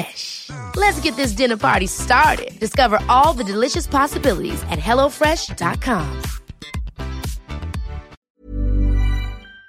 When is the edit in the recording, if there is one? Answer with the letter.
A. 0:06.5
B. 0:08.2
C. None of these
B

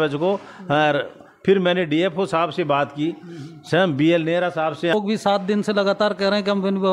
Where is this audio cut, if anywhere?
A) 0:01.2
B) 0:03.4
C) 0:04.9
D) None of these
C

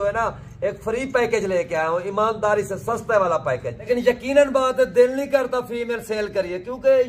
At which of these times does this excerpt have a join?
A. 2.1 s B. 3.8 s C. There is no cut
B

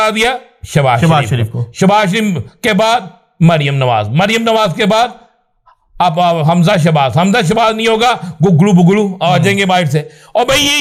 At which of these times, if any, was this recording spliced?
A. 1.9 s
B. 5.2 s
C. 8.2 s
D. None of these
D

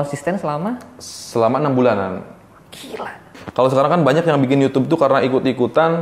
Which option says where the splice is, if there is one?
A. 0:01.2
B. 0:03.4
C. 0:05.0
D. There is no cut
B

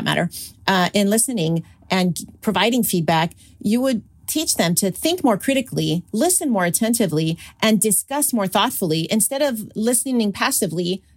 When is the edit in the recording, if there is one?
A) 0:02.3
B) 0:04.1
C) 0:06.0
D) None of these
B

